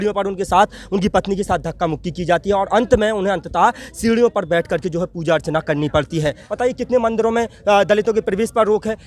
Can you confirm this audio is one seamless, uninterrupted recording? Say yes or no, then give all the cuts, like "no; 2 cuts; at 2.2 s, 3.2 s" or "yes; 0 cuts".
no; 1 cut; at 6.5 s